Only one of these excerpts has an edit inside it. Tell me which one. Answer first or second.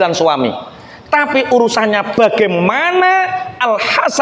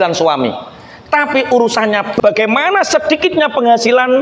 second